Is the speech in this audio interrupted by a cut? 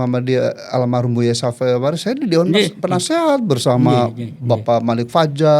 no; 0 cuts

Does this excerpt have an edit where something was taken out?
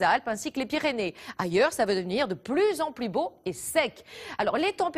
no; 0 cuts

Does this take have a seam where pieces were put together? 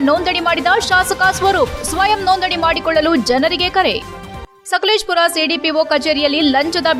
no; 0 cuts

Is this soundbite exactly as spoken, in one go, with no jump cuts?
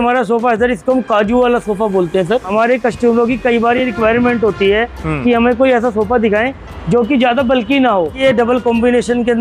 no; 2 cuts; at 2.5 s, 8.2 s

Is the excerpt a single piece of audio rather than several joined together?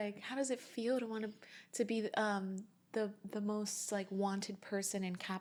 yes; 0 cuts

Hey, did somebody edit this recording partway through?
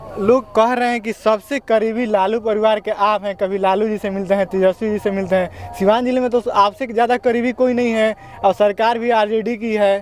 no; 0 cuts

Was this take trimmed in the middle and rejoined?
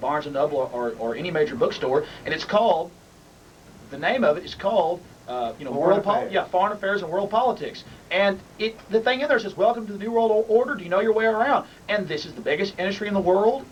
no; 0 cuts

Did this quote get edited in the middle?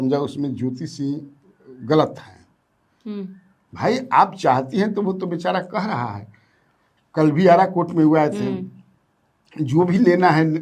no; 0 cuts

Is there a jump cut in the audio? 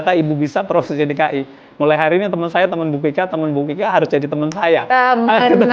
no; 0 cuts

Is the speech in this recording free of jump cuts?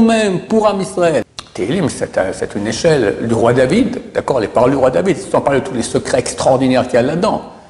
no; 1 cut; at 1.4 s

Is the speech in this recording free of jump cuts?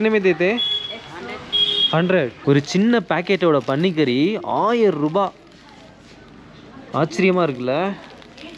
no; 1 cut; at 2.4 s

